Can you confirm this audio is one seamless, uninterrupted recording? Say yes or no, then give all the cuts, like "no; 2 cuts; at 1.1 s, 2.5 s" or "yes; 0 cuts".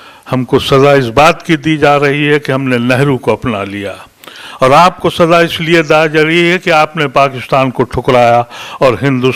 yes; 0 cuts